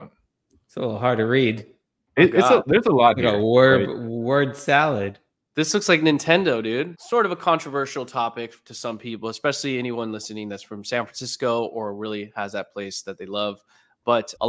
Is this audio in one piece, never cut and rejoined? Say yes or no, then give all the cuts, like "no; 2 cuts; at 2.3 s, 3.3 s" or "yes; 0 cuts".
no; 1 cut; at 7.0 s